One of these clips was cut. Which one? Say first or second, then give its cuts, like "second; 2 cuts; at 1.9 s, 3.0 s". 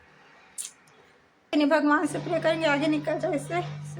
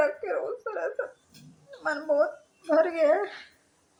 first; 1 cut; at 1.5 s